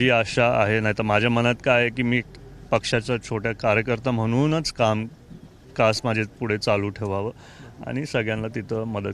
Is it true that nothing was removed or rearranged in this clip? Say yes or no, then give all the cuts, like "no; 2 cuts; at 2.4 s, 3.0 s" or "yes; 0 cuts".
yes; 0 cuts